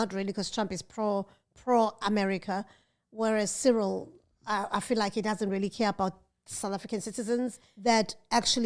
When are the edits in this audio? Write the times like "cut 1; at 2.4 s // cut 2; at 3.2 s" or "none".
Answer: cut 1; at 7.6 s